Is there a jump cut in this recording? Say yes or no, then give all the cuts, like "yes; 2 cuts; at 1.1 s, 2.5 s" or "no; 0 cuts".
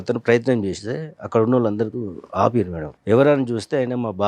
yes; 1 cut; at 2.8 s